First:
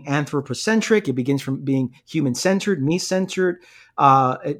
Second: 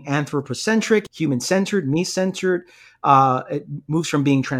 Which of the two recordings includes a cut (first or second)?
second